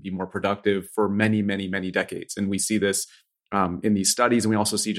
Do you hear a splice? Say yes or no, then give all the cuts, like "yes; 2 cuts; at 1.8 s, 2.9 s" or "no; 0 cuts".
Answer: no; 0 cuts